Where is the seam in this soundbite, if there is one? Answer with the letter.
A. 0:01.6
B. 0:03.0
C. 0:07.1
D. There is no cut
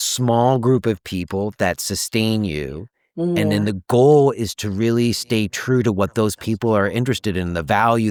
D